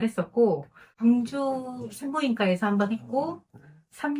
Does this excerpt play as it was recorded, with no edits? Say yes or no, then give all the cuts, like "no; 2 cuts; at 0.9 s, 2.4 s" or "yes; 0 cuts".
no; 1 cut; at 0.9 s